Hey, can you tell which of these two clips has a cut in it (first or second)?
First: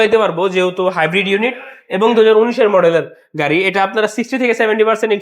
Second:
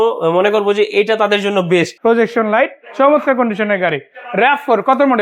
second